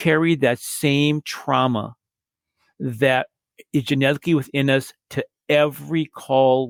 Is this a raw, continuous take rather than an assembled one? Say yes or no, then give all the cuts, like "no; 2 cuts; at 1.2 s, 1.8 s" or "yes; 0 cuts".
yes; 0 cuts